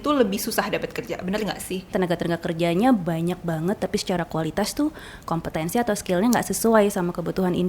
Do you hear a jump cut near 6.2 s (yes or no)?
no